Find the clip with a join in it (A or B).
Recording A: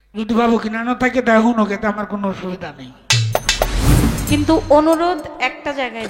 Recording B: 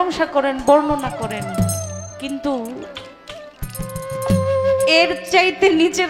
A